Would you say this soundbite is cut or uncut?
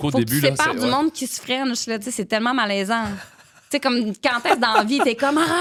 uncut